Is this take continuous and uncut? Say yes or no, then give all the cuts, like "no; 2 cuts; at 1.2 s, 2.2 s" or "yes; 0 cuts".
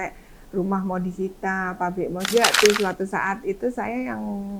no; 1 cut; at 2.3 s